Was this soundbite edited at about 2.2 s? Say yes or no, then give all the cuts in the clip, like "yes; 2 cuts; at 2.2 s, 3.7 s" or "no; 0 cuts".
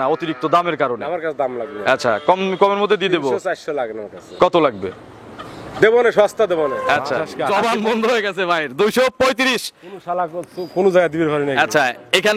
no; 1 cut; at 7.3 s